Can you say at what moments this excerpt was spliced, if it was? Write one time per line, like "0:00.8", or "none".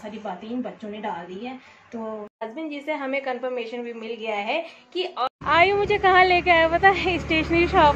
0:02.4
0:05.2